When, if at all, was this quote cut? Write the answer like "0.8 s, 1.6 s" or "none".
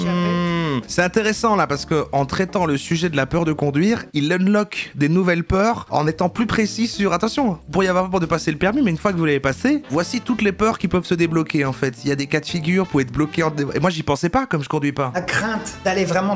15.1 s